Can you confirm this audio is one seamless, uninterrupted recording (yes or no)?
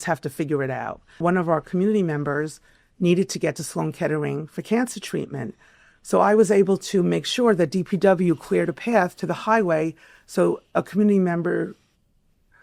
no